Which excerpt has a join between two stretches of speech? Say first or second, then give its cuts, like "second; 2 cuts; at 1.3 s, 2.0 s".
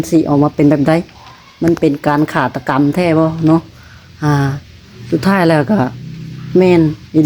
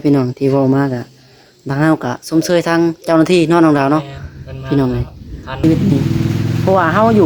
second; 1 cut; at 5.6 s